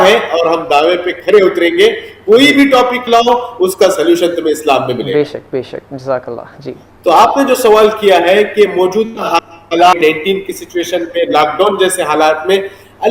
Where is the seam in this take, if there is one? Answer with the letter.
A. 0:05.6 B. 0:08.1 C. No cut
C